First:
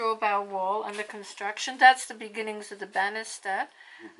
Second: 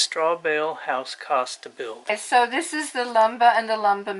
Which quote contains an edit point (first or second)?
second